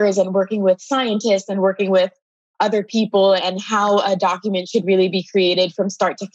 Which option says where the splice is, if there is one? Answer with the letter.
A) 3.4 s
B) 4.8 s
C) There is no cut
A